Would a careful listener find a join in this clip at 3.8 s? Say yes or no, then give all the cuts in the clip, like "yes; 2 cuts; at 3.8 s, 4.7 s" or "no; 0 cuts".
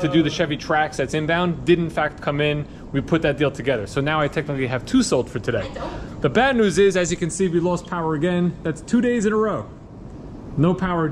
no; 0 cuts